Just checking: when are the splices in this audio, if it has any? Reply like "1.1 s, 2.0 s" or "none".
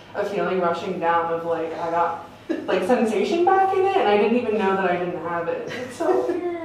none